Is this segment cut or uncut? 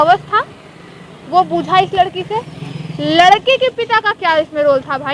uncut